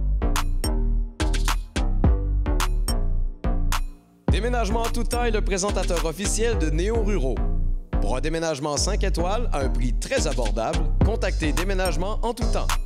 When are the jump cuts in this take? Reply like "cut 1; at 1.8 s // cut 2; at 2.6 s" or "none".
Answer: none